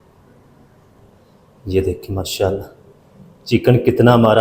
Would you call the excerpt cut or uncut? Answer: cut